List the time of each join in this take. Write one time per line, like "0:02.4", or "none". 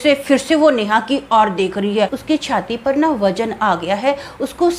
0:02.2